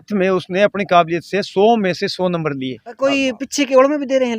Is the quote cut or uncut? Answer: cut